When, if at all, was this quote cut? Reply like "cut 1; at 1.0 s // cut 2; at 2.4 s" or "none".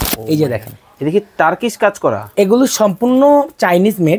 none